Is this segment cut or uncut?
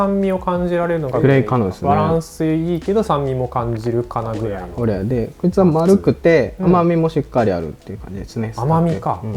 cut